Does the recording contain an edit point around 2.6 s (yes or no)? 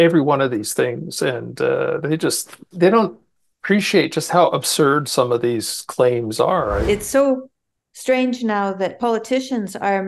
yes